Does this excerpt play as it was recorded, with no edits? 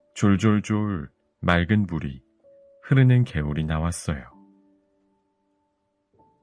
no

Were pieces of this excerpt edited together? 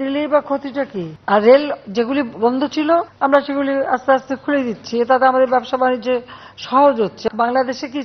yes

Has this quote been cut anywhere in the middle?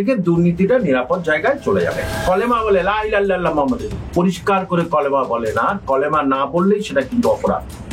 yes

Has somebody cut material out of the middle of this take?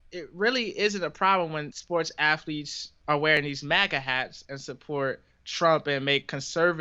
yes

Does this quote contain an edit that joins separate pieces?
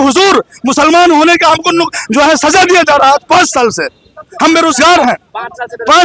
no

